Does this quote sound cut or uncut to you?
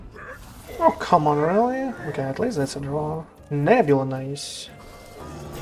uncut